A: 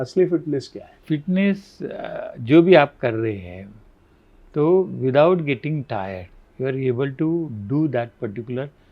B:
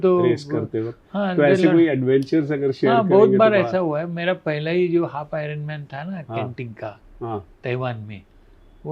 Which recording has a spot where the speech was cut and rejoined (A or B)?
A